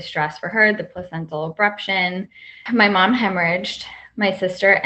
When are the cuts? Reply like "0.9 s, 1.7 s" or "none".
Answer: 2.6 s